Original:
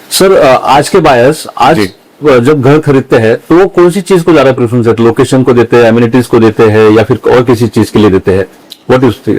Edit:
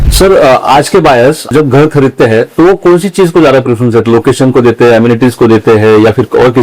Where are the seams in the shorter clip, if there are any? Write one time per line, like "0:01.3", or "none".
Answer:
0:01.5